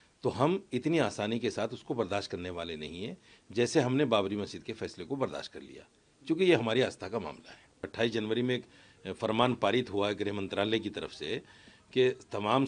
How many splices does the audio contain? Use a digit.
1